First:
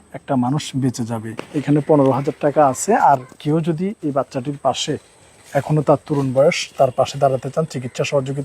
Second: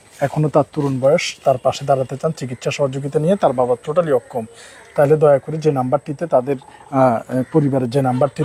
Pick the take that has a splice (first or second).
first